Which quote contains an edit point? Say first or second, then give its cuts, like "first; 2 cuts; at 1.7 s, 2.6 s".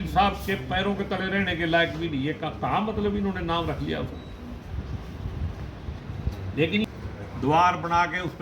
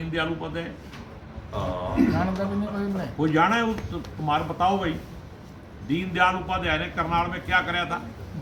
first; 1 cut; at 6.9 s